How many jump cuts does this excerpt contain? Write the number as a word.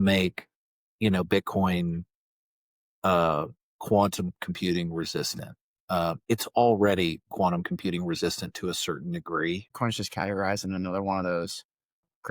one